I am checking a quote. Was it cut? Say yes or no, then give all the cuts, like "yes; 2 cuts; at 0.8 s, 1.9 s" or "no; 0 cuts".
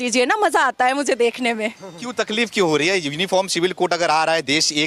no; 0 cuts